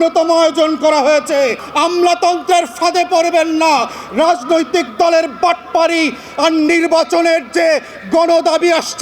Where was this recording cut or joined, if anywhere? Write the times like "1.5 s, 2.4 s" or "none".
1.6 s